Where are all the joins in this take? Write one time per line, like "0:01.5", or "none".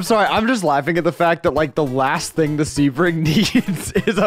none